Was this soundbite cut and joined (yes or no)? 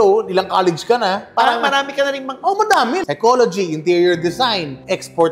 yes